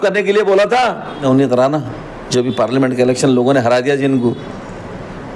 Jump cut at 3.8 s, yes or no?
no